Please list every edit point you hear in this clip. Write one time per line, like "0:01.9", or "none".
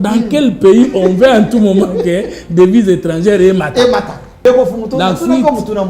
0:04.4

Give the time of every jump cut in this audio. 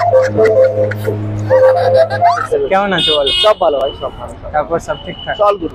0:02.4

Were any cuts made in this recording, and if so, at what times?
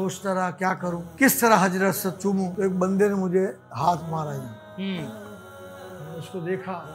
0:01.0
0:02.5

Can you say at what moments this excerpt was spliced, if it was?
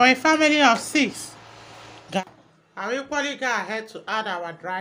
0:02.2

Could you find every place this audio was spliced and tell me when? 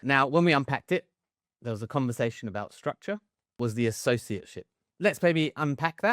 0:03.5
0:04.9

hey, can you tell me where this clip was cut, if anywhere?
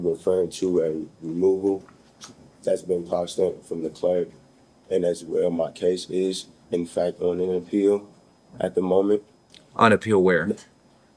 none

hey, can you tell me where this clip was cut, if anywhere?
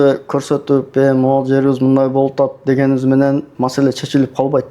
0:03.5

